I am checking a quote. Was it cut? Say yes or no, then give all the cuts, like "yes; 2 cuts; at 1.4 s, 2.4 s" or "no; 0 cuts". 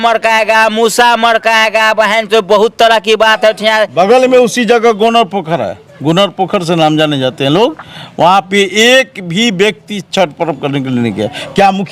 yes; 1 cut; at 3.9 s